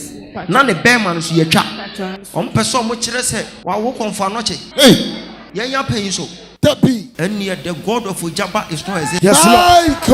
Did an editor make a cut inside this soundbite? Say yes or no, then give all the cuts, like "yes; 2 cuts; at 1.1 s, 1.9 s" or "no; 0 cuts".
yes; 5 cuts; at 2.2 s, 3.5 s, 4.6 s, 5.4 s, 7.1 s